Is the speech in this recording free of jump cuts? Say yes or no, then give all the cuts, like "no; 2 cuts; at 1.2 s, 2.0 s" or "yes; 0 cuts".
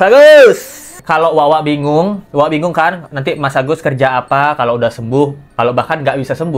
no; 1 cut; at 0.9 s